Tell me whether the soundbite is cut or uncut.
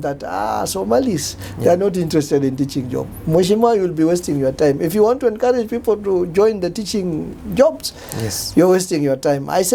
uncut